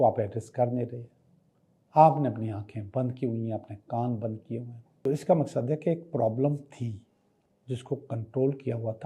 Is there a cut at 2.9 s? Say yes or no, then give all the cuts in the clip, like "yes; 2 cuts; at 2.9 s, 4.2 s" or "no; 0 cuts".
no; 1 cut; at 5.1 s